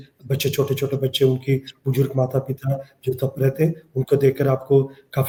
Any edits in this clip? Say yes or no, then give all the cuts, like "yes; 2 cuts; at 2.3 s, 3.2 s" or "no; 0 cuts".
no; 0 cuts